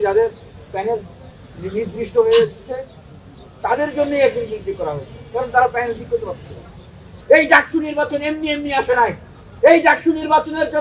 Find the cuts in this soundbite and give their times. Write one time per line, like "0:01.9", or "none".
0:07.1